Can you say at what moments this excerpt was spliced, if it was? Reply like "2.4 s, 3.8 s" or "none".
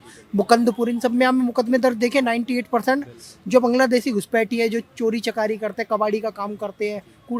none